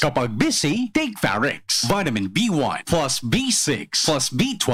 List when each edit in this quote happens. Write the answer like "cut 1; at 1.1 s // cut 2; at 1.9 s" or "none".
none